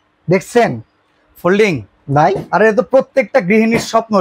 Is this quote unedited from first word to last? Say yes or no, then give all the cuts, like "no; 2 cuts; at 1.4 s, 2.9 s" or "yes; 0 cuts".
yes; 0 cuts